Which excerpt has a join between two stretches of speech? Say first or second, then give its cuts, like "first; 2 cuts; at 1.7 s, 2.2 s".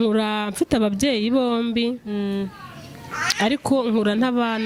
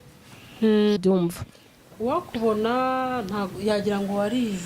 second; 1 cut; at 1.0 s